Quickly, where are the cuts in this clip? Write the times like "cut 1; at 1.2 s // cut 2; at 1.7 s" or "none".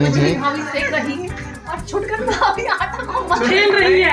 none